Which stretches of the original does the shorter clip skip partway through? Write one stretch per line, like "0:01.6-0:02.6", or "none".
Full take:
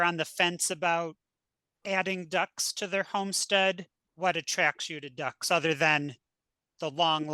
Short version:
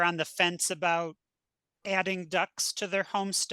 none